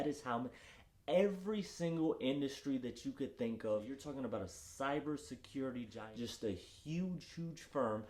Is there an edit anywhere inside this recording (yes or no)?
yes